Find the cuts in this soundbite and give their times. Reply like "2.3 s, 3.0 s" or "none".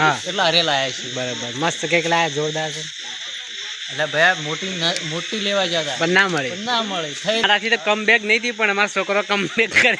7.4 s